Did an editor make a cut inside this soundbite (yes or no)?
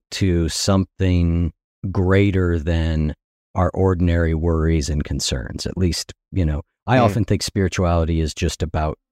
no